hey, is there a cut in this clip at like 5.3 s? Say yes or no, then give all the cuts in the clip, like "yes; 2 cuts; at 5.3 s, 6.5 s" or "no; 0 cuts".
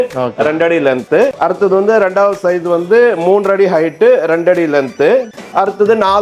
no; 0 cuts